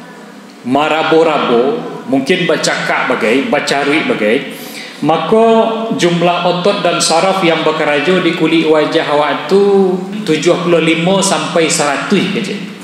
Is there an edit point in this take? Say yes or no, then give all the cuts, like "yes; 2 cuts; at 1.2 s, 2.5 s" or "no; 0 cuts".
yes; 1 cut; at 10.1 s